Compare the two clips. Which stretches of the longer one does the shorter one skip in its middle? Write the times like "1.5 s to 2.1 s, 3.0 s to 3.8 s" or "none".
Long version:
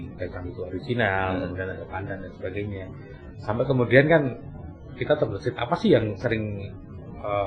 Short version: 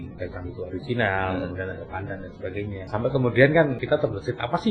2.8 s to 3.4 s, 4.3 s to 5.0 s